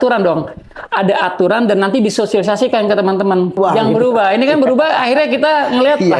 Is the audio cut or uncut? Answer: cut